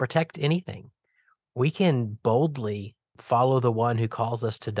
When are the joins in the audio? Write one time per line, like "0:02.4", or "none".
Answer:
0:03.1